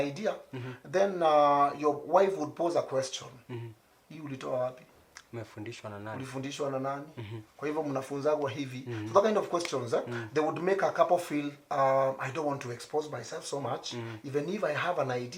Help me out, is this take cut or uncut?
uncut